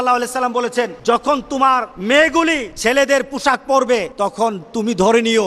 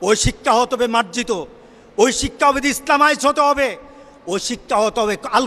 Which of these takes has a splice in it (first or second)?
first